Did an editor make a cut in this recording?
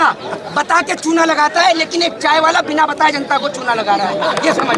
no; 0 cuts

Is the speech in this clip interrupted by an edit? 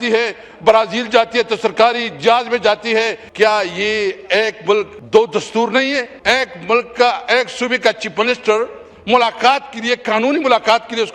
yes; 3 cuts; at 3.2 s, 5.0 s, 6.1 s

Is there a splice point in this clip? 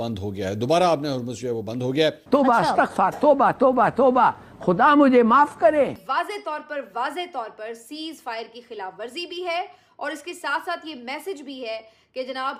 yes; 1 cut; at 6.0 s

